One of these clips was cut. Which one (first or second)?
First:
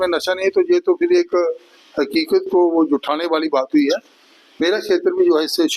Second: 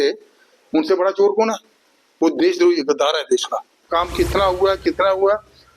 second